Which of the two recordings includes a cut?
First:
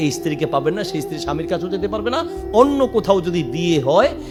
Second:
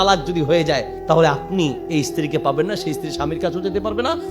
second; 1 cut; at 0.9 s

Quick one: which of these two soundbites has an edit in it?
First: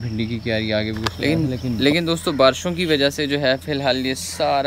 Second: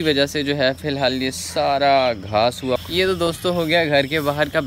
second; 1 cut; at 2.8 s

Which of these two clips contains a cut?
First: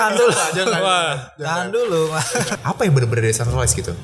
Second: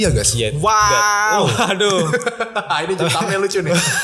first; 1 cut; at 2.6 s

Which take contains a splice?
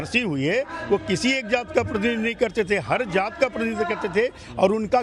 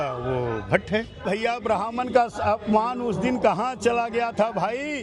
second; 1 cut; at 1.2 s

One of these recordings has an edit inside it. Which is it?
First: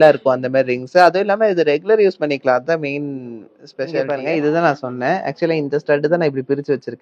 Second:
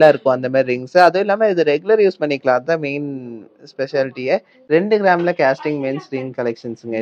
first; 1 cut; at 4.1 s

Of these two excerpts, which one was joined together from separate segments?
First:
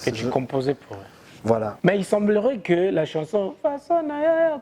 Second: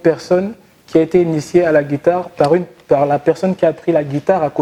first; 1 cut; at 1.7 s

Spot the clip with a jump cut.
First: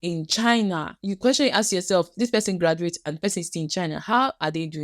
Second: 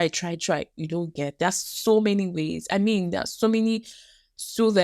first; 1 cut; at 0.9 s

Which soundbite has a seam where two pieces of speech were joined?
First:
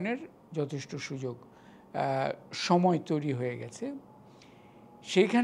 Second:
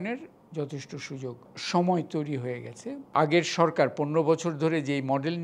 second; 2 cuts; at 1.5 s, 3.0 s

